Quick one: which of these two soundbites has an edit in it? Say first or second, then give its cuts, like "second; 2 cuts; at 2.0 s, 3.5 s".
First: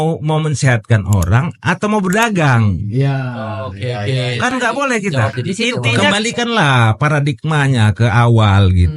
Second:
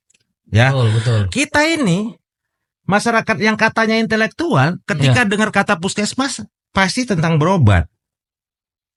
first; 1 cut; at 6.1 s